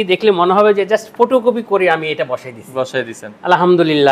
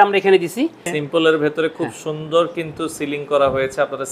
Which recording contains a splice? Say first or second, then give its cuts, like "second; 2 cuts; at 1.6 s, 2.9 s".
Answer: second; 1 cut; at 0.9 s